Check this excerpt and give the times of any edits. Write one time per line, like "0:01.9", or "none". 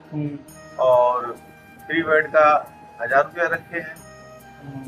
none